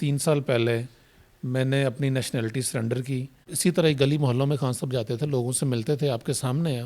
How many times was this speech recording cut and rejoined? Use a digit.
1